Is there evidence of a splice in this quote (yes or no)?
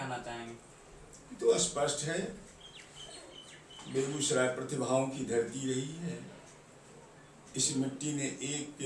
no